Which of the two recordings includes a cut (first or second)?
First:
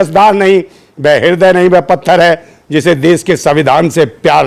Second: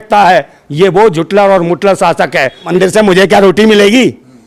second